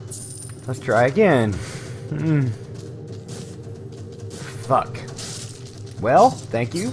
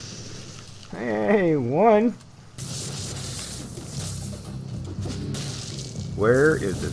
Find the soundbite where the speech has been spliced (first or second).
second